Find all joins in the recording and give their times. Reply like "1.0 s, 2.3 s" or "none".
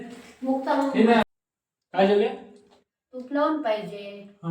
1.2 s